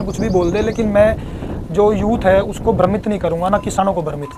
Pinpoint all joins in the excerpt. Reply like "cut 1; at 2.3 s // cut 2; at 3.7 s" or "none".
none